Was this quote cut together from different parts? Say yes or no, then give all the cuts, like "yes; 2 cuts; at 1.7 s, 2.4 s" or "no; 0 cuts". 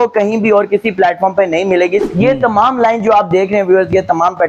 yes; 1 cut; at 2.1 s